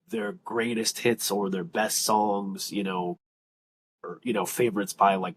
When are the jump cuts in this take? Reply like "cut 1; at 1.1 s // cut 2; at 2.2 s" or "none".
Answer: none